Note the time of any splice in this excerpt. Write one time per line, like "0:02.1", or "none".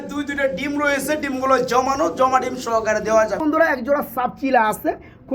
0:03.8